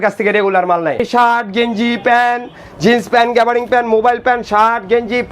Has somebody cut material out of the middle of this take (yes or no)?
yes